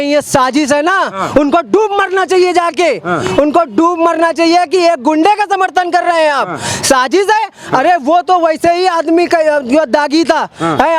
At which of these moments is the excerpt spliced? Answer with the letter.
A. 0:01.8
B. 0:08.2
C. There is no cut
C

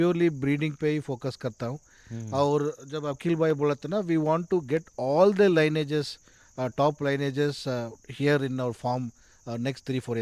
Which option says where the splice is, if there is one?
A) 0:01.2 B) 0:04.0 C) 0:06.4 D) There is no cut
D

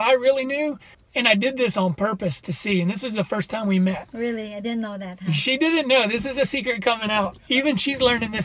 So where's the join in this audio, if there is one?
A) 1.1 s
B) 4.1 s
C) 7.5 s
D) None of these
A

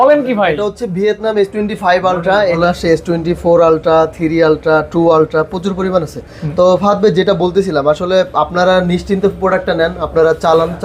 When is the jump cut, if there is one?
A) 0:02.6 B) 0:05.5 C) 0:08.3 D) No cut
A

